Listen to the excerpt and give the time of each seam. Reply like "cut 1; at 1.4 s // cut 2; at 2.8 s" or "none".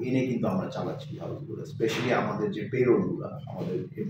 none